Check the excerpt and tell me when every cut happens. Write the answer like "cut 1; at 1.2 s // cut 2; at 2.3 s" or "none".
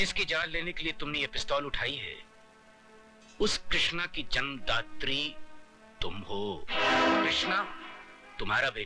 none